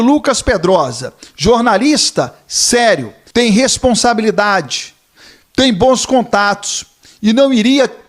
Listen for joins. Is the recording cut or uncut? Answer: cut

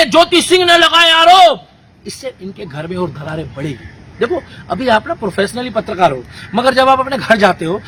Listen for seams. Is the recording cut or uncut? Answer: uncut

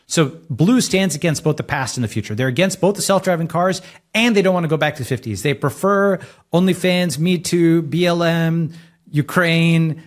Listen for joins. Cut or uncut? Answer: uncut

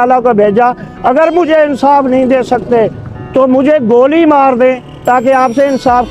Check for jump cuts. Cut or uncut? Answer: uncut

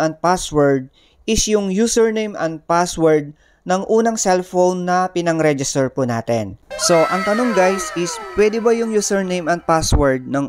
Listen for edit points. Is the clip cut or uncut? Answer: uncut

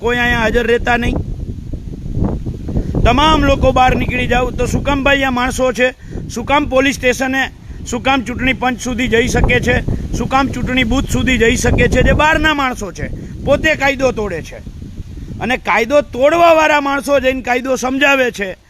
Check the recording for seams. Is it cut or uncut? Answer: uncut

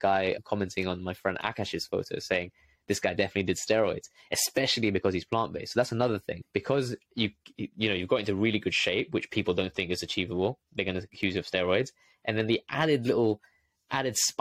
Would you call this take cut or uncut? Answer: uncut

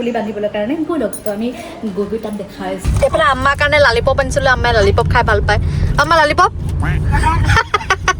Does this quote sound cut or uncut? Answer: cut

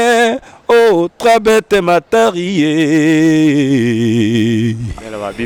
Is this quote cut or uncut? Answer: uncut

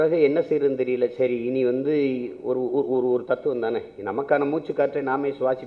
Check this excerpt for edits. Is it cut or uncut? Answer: uncut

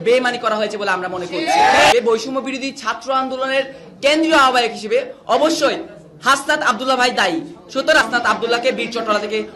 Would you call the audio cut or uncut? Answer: cut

